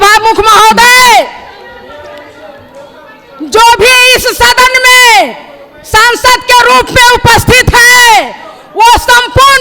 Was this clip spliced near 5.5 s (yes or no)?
no